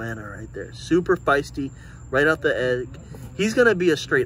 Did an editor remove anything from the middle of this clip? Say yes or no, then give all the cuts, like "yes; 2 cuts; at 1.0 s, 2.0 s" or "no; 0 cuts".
no; 0 cuts